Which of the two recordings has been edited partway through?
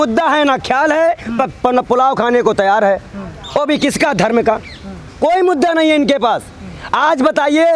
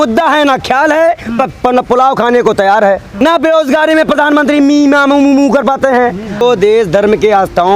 second; 2 cuts; at 3.2 s, 6.4 s

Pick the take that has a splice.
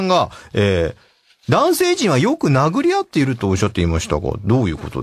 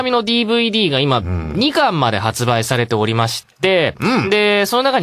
second; 1 cut; at 2.9 s

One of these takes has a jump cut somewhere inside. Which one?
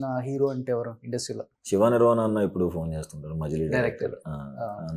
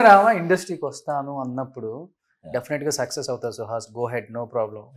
first; 1 cut; at 1.5 s

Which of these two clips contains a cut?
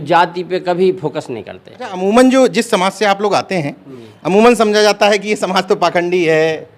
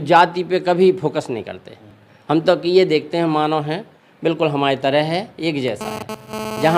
first; 1 cut; at 2.0 s

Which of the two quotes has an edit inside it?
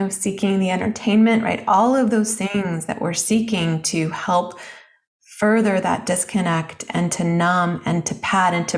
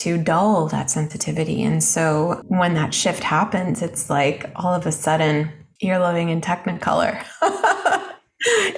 second; 2 cuts; at 2.4 s, 5.6 s

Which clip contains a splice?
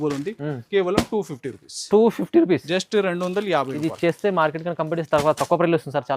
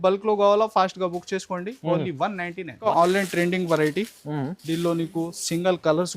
second; 1 cut; at 2.9 s

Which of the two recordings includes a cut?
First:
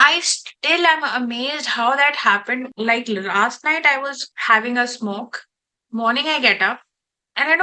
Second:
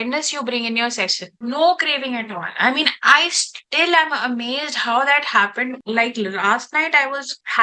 second; 1 cut; at 1.3 s

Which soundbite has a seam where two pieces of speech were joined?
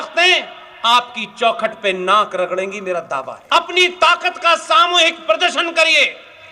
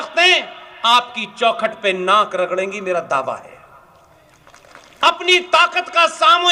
first; 1 cut; at 3.3 s

